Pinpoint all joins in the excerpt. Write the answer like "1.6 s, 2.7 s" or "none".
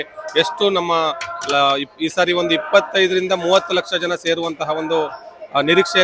none